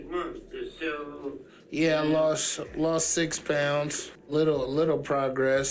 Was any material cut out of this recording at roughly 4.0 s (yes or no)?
yes